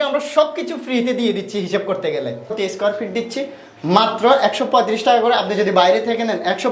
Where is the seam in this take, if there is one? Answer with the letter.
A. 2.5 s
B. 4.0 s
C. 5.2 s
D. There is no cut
A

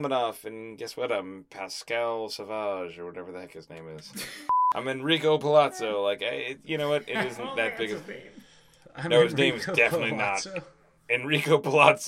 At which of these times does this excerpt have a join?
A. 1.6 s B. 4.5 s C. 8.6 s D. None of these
B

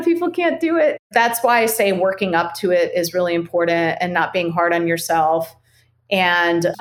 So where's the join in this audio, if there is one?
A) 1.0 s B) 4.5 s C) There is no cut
A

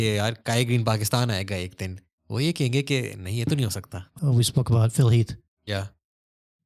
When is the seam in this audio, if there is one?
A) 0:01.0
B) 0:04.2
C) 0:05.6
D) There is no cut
B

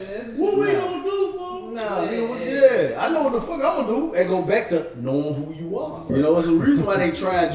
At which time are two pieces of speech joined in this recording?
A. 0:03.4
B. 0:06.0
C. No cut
B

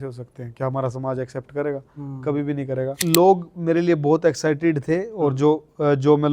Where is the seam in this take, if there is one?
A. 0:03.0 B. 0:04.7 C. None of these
A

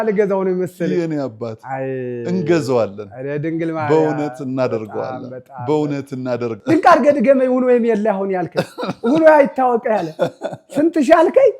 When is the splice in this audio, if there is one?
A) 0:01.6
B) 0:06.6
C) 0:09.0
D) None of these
B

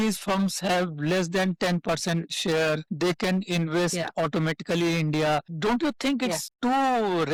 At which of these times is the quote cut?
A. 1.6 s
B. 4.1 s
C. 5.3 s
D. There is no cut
D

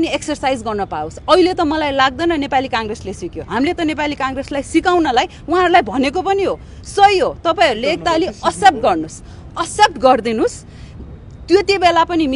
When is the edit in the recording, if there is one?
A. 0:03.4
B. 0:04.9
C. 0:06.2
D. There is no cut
D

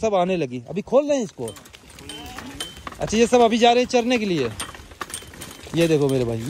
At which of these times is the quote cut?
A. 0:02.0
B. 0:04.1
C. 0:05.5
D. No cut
D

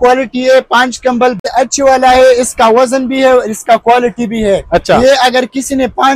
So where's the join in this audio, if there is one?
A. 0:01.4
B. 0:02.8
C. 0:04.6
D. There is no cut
A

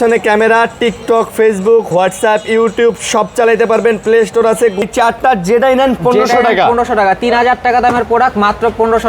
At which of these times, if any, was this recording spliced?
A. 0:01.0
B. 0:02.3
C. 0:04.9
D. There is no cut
C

